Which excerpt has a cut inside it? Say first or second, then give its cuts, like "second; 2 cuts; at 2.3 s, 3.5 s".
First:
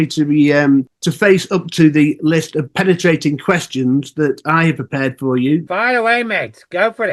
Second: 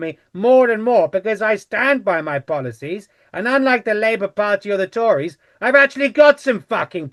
first; 2 cuts; at 1.0 s, 5.7 s